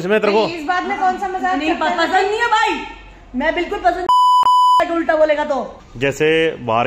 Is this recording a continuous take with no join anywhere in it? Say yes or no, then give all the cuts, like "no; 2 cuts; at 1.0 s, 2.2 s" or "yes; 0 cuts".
no; 3 cuts; at 4.0 s, 4.8 s, 5.8 s